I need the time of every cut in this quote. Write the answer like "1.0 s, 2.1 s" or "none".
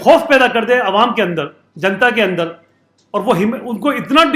none